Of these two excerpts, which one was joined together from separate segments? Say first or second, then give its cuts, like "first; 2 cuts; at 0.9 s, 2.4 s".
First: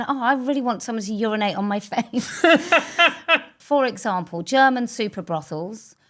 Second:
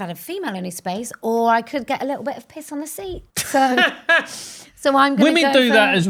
first; 1 cut; at 3.5 s